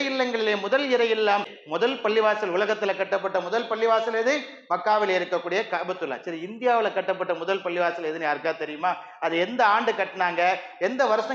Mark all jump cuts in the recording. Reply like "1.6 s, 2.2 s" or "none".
1.6 s

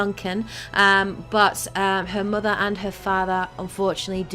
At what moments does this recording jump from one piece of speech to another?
1.9 s

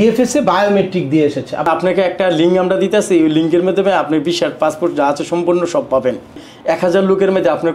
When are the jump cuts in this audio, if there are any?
1.7 s, 6.5 s

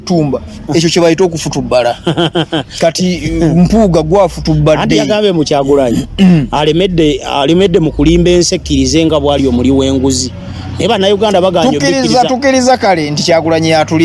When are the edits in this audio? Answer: none

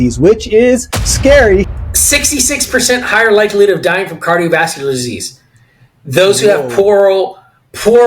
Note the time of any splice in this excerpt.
1.7 s

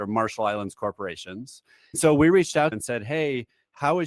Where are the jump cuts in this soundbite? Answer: 2.0 s, 2.8 s

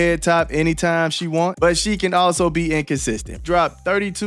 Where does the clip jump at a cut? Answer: 1.5 s, 3.4 s

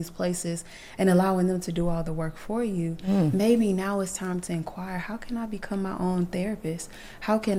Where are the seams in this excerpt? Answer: none

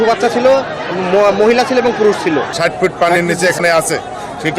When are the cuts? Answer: 2.5 s

